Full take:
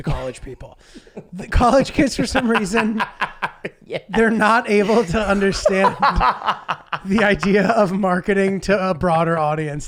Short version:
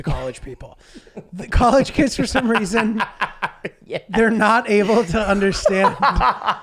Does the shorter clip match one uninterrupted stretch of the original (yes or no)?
yes